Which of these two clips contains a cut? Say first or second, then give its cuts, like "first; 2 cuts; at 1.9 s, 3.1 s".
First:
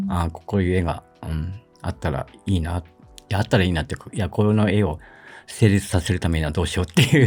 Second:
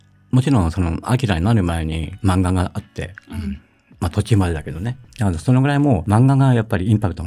second; 3 cuts; at 2.1 s, 5.0 s, 6.0 s